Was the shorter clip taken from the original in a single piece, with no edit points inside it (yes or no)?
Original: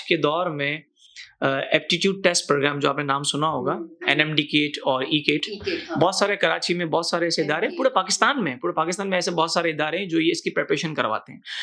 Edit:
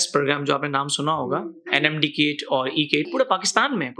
no